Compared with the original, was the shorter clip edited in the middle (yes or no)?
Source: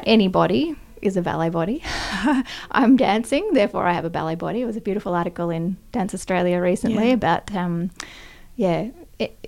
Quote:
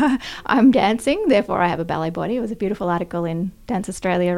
no